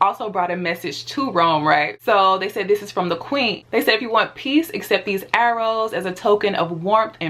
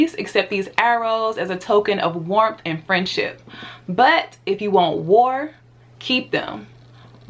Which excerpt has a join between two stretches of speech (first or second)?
first